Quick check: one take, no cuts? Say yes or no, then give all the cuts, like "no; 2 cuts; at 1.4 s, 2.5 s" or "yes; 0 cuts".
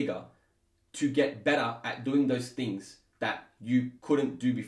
yes; 0 cuts